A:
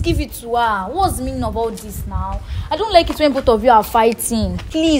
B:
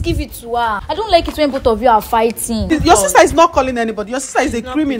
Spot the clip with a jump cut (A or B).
B